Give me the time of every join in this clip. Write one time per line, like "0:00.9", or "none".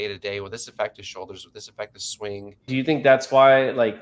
0:02.6